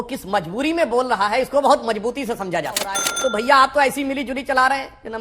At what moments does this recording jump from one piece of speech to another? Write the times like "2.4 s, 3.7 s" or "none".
3.1 s